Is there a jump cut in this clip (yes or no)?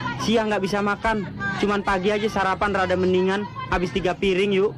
no